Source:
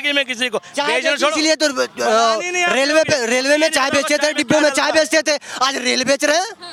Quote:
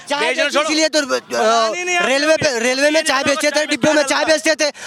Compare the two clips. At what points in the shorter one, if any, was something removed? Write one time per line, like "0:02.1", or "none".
none